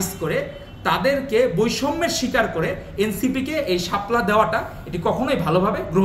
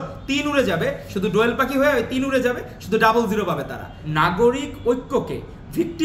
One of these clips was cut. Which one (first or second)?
second